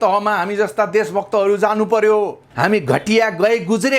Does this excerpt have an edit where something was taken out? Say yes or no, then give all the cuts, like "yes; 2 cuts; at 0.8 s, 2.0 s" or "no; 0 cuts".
yes; 1 cut; at 2.4 s